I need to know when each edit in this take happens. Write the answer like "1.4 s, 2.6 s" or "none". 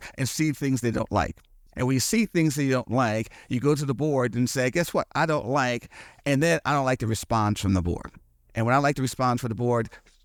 none